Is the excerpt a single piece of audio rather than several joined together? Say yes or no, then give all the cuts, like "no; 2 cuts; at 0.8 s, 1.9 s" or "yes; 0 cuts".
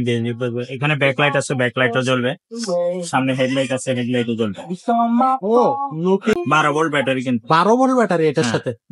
no; 1 cut; at 6.4 s